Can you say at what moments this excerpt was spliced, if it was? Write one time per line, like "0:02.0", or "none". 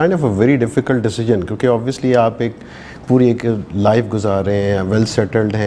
none